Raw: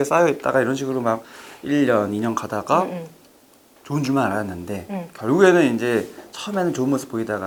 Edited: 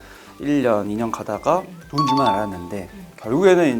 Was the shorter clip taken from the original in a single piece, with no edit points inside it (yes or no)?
no